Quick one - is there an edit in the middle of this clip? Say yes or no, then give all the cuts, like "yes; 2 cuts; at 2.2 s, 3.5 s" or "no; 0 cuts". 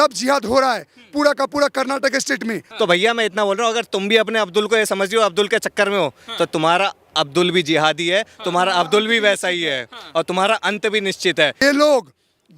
yes; 2 cuts; at 2.6 s, 11.6 s